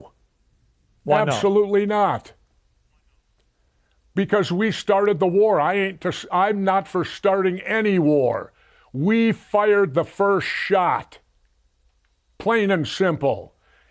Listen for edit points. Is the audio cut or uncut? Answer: uncut